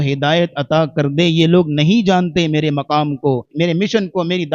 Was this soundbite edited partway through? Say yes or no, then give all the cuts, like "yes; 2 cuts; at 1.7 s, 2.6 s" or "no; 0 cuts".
yes; 1 cut; at 3.5 s